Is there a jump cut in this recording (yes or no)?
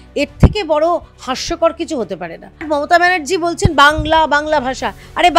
yes